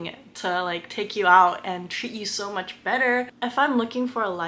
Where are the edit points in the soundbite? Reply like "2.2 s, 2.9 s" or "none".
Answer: 3.3 s